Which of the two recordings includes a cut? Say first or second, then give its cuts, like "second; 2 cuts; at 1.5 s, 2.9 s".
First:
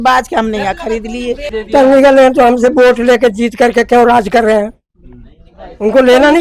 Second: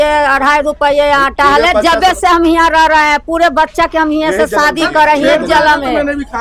first; 1 cut; at 1.5 s